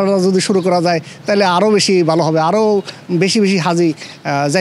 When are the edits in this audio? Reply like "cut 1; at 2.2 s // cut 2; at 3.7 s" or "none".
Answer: none